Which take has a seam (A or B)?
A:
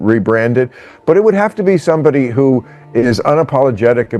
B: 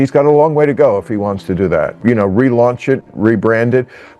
B